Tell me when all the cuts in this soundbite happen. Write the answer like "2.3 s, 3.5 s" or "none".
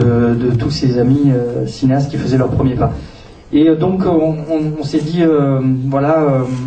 5.5 s